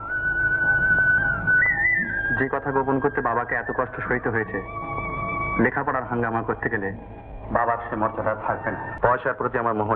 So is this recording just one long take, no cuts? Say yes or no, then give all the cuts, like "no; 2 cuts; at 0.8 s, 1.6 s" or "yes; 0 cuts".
no; 1 cut; at 8.9 s